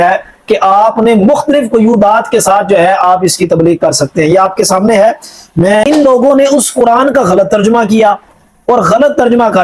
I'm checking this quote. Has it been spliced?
yes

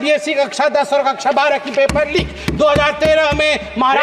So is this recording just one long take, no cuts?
yes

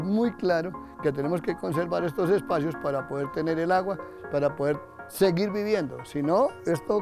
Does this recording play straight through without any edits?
yes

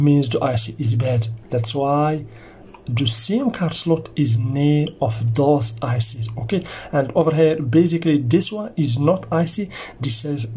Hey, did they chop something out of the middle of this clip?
no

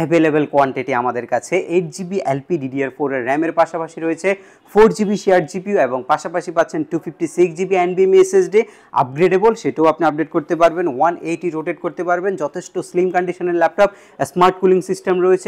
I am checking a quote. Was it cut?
no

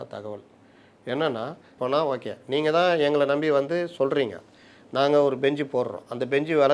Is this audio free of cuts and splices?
no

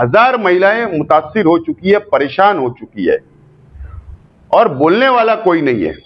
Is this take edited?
no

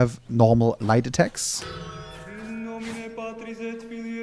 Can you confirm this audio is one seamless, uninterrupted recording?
no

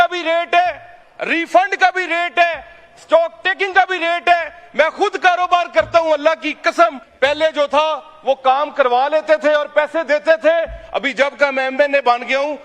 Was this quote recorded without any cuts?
no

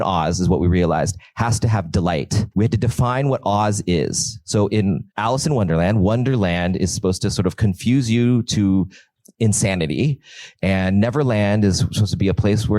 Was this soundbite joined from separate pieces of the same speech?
yes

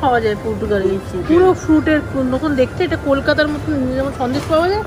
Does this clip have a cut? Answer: no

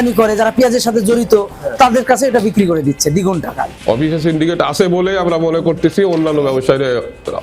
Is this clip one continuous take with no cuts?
no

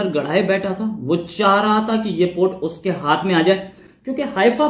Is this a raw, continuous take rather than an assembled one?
yes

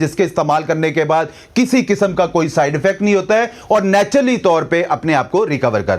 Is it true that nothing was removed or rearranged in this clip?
yes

